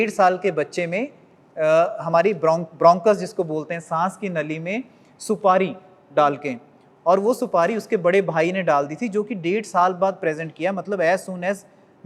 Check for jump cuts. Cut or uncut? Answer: uncut